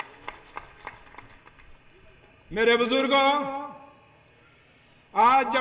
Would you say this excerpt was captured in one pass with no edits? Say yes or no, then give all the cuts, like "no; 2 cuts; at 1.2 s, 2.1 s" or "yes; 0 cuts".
yes; 0 cuts